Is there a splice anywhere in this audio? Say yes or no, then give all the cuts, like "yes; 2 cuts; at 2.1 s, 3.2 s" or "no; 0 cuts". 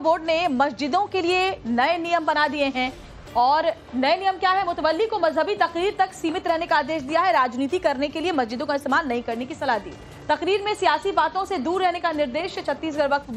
yes; 1 cut; at 11.0 s